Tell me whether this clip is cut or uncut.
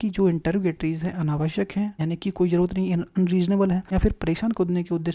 cut